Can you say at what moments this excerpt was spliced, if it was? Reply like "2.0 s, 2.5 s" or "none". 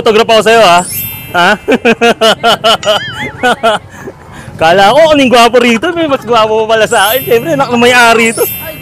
none